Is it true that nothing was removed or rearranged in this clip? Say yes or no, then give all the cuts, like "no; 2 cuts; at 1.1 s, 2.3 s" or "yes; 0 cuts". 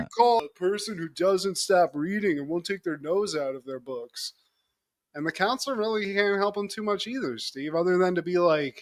yes; 0 cuts